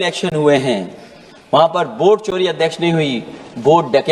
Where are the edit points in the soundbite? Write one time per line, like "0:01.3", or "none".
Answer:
none